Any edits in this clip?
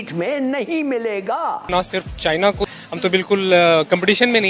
yes; 2 cuts; at 1.7 s, 2.7 s

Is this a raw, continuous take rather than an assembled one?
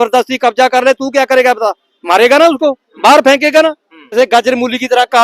no; 1 cut; at 4.1 s

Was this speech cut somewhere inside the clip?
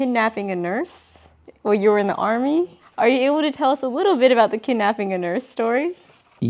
no; 0 cuts

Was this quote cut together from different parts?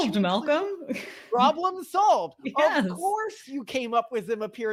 no; 0 cuts

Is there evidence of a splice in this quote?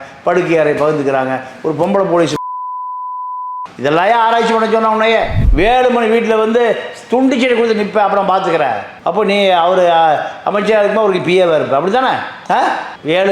yes; 1 cut; at 5.4 s

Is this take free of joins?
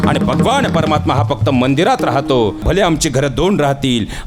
no; 1 cut; at 2.6 s

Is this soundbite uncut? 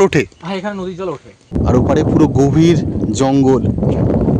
no; 1 cut; at 1.5 s

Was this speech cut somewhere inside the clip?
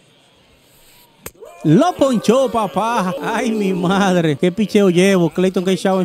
yes; 2 cuts; at 3.2 s, 4.4 s

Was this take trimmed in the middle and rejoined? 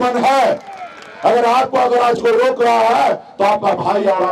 no; 0 cuts

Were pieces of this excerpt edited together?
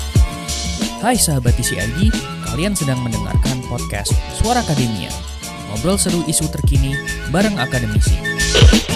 no; 0 cuts

